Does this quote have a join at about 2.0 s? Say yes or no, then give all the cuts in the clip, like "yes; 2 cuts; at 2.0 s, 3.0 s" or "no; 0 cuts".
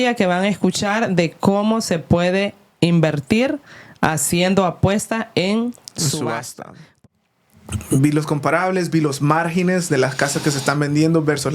no; 1 cut; at 7.0 s